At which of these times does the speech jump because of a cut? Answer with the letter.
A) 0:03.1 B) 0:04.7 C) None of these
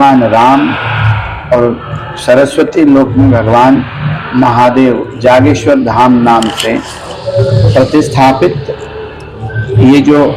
C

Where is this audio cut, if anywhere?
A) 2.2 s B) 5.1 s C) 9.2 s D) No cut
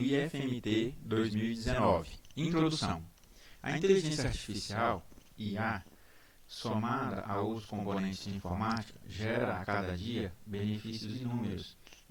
A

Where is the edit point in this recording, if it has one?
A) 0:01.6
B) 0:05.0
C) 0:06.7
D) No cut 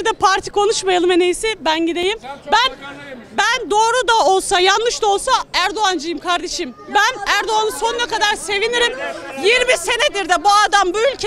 D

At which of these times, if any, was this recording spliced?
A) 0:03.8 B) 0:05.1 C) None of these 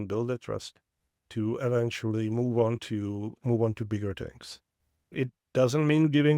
B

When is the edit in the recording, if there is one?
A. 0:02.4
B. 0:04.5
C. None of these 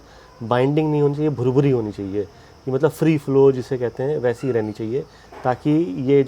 C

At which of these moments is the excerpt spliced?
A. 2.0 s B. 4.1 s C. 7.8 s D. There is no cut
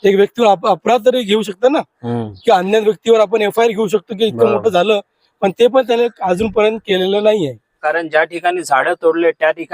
C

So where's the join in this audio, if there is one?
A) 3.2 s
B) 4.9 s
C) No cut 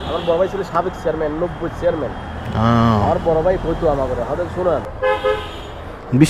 B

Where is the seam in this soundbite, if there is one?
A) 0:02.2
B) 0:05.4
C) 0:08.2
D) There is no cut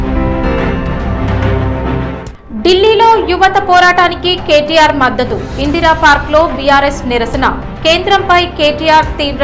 A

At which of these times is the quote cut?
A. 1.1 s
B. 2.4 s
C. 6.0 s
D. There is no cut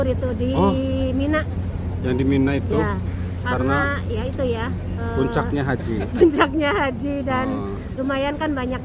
D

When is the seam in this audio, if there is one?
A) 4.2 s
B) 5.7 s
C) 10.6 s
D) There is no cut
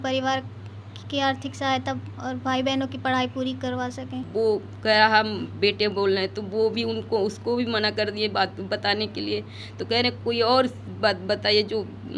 A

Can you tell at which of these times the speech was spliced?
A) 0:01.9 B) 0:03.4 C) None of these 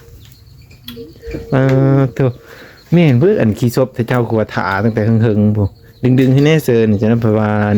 C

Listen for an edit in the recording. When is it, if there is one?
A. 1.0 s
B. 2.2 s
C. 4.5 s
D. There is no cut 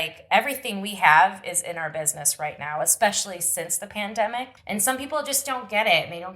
C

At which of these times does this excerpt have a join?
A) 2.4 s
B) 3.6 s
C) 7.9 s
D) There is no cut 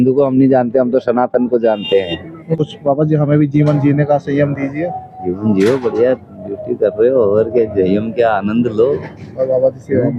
A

